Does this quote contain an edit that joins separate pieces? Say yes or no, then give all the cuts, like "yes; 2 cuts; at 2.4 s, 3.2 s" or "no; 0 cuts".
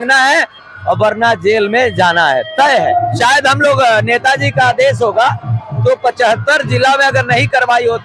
yes; 1 cut; at 3.1 s